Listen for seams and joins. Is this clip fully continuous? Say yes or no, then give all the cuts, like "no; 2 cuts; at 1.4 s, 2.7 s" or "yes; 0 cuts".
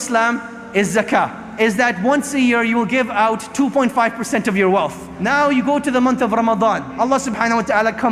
no; 3 cuts; at 1.4 s, 5.2 s, 6.9 s